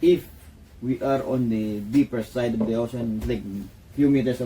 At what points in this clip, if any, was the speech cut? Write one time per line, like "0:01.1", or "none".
none